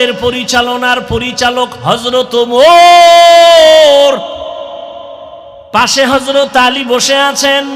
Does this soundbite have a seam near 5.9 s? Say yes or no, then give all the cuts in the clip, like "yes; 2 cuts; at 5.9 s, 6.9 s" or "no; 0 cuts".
yes; 1 cut; at 5.9 s